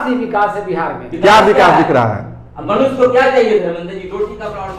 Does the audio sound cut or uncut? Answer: uncut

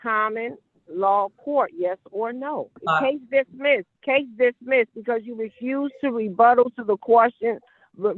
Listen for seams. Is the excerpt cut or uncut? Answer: cut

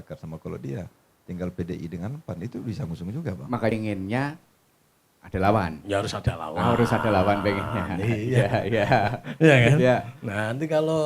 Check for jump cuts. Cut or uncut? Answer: cut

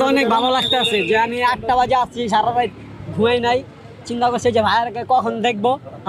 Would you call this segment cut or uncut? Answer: uncut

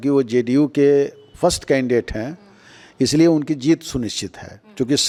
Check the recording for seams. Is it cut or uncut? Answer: uncut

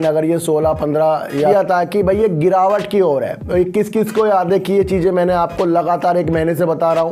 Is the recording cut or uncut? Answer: cut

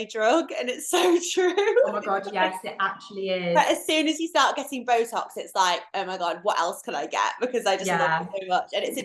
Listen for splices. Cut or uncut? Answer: uncut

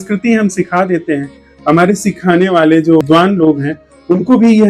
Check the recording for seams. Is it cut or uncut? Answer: cut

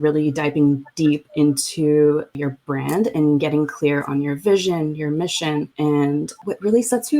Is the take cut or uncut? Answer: cut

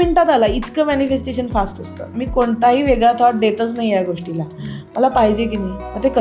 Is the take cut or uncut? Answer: cut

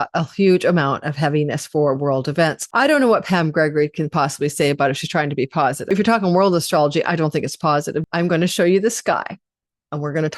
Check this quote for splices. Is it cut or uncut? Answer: cut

